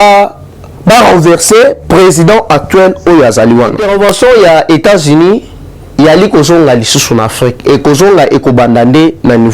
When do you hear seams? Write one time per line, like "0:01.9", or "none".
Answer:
0:03.8